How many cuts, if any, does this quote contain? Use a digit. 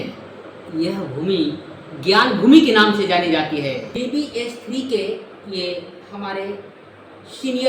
1